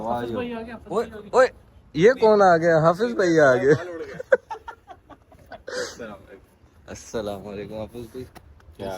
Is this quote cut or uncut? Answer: cut